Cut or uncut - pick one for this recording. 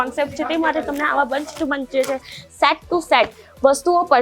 uncut